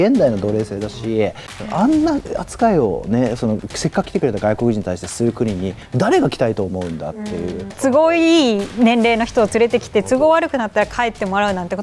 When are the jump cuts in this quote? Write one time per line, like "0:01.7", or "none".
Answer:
0:01.7
0:07.8